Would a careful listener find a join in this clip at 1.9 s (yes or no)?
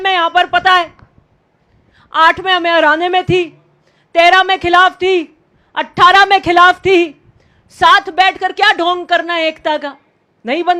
no